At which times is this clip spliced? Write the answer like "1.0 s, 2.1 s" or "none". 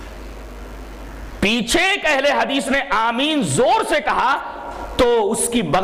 none